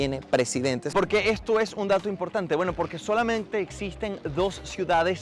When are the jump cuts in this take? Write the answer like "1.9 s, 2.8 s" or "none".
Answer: 0.9 s